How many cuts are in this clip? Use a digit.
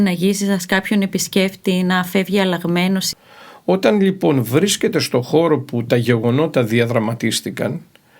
1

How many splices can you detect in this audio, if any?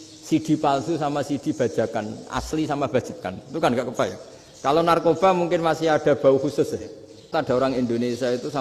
1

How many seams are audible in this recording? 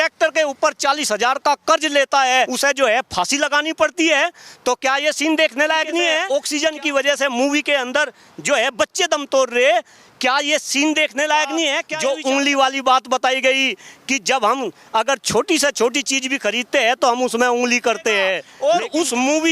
4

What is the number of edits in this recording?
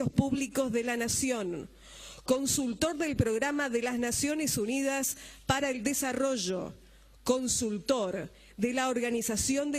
1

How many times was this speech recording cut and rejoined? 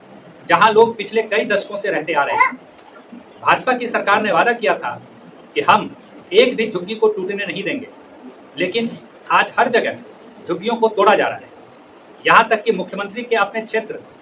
0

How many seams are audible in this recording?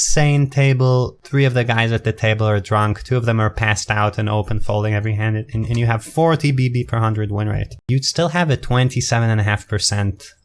2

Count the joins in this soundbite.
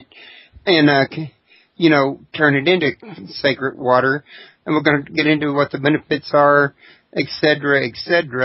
0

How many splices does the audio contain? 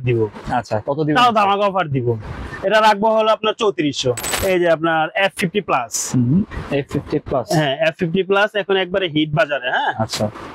1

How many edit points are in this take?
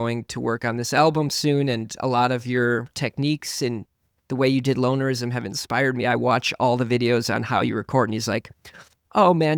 0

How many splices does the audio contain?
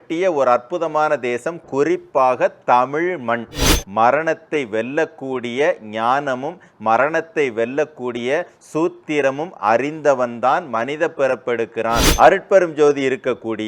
2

